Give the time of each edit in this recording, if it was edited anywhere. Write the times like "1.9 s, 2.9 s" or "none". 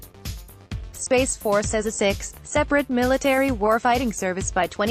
1.0 s